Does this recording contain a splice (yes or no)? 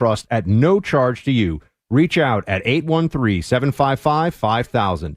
no